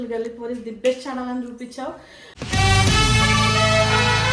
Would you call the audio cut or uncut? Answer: uncut